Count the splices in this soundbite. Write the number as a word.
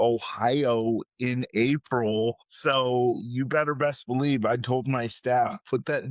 one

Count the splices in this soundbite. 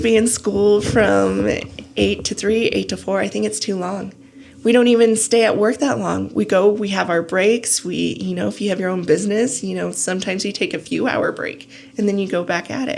zero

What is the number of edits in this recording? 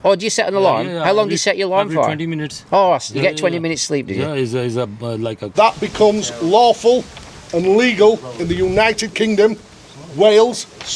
one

